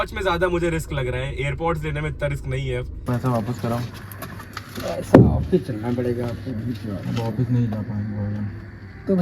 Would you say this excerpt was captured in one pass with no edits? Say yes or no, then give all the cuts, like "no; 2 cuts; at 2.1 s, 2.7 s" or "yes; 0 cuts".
no; 1 cut; at 3.0 s